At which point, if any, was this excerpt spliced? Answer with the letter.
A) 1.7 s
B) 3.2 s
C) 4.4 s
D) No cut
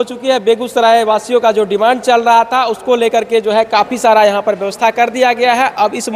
D